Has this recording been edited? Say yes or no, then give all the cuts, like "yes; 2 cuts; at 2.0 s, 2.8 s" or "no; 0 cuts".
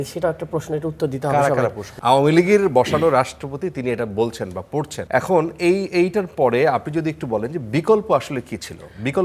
yes; 2 cuts; at 1.9 s, 5.0 s